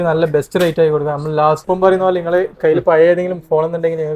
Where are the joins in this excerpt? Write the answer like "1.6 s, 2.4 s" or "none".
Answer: 1.6 s